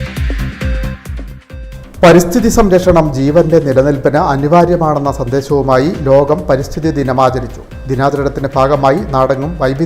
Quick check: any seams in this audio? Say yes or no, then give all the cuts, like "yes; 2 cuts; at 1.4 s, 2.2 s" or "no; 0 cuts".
yes; 1 cut; at 1.4 s